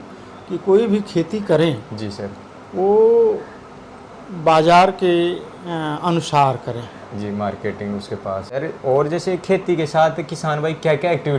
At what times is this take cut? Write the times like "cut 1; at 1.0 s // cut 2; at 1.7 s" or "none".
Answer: cut 1; at 8.6 s